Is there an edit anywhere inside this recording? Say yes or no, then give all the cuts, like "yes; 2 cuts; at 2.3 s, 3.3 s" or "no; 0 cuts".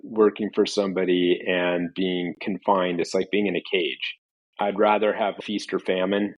no; 0 cuts